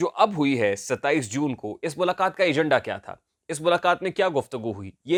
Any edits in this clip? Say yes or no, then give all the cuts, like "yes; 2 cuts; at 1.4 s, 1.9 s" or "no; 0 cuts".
no; 0 cuts